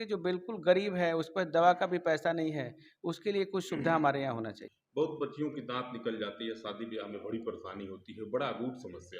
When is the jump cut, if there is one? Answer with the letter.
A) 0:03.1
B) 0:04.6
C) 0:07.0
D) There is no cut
B